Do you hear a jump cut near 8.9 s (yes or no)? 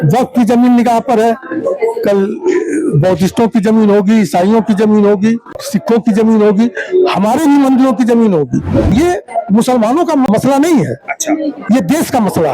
yes